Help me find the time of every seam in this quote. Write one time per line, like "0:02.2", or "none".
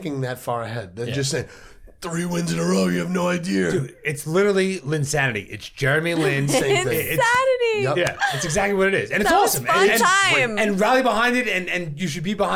none